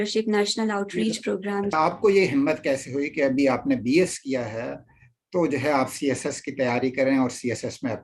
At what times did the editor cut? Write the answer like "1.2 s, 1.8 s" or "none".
1.7 s